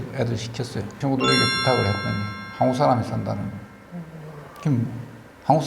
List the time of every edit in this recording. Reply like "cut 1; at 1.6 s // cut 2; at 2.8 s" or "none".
cut 1; at 0.9 s